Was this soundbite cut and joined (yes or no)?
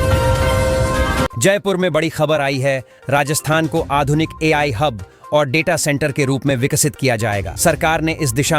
yes